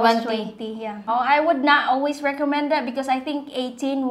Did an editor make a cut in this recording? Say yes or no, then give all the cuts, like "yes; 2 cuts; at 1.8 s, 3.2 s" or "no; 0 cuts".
yes; 1 cut; at 1.1 s